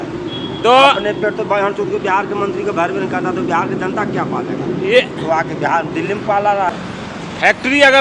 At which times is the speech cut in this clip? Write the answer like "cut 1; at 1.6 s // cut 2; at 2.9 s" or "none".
cut 1; at 6.7 s